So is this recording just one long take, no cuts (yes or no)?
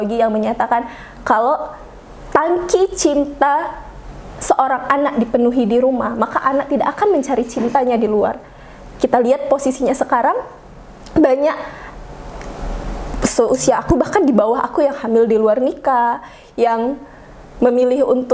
yes